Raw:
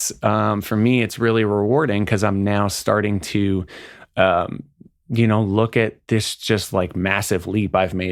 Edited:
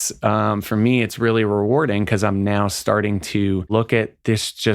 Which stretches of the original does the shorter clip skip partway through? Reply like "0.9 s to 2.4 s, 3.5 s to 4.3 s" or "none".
3.7 s to 5.5 s